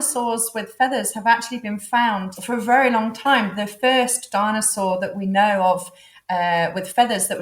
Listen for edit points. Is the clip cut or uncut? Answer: uncut